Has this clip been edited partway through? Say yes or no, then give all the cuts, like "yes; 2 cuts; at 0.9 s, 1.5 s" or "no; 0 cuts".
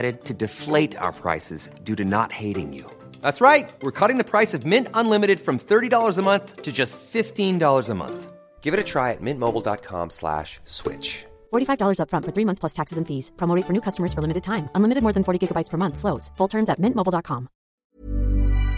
yes; 1 cut; at 17.8 s